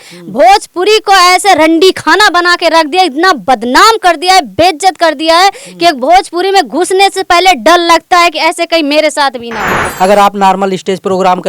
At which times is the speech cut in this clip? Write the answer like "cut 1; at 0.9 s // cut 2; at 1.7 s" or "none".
cut 1; at 9.8 s